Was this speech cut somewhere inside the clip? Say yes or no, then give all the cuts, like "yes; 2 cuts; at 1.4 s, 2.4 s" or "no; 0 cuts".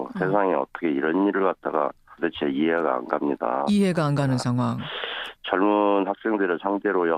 yes; 1 cut; at 5.1 s